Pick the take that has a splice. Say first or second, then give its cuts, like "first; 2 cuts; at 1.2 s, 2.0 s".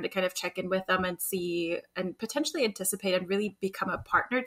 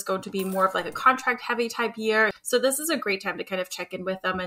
second; 1 cut; at 2.4 s